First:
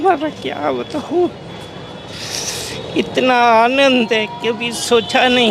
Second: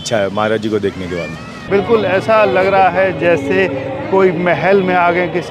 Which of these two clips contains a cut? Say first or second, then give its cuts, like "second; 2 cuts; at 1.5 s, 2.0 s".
second; 1 cut; at 1.6 s